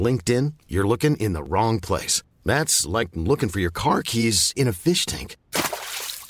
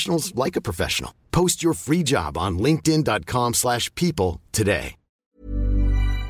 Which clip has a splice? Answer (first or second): second